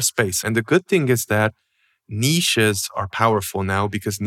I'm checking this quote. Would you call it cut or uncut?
uncut